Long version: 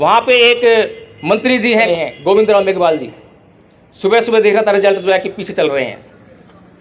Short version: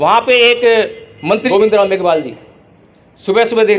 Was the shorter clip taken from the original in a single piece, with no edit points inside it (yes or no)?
no